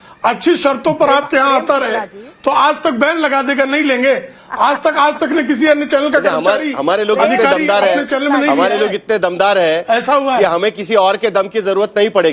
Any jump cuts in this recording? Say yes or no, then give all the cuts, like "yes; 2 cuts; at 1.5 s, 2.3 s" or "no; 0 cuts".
no; 0 cuts